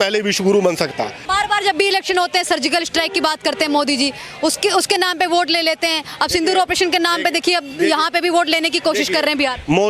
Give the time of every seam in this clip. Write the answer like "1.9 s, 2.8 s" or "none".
1.2 s